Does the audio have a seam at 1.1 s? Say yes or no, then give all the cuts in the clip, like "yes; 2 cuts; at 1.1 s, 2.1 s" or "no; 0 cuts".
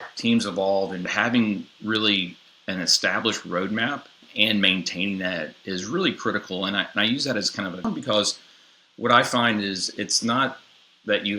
yes; 3 cuts; at 1.1 s, 4.3 s, 7.8 s